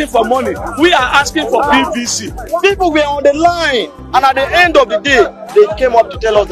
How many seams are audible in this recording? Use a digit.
1